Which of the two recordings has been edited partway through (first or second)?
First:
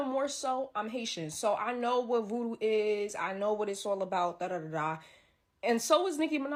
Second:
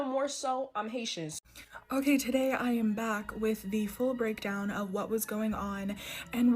second